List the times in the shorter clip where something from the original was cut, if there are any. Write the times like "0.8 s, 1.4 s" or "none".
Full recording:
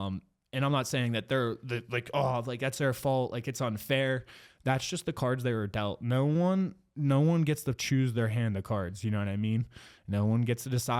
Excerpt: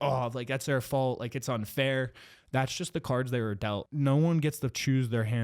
3.8 s